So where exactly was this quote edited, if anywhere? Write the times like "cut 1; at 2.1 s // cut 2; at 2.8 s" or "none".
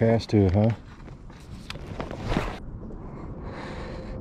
cut 1; at 2.6 s